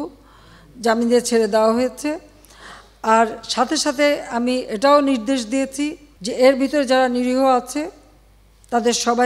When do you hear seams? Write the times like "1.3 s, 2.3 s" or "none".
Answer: none